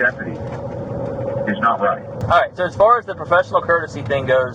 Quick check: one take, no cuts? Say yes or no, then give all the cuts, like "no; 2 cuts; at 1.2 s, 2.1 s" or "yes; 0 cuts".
no; 1 cut; at 2.1 s